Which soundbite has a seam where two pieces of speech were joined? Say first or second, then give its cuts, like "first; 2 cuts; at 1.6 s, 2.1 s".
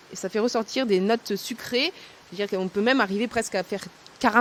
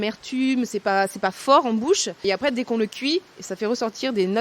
second; 1 cut; at 2.2 s